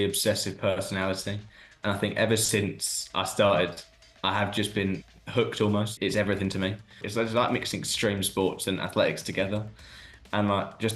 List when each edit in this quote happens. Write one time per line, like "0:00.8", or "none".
0:05.9
0:06.9